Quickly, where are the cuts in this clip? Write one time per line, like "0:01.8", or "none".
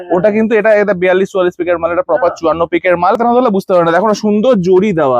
0:03.2